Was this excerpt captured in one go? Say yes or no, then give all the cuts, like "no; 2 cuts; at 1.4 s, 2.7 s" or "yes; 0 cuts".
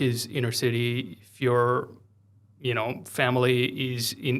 yes; 0 cuts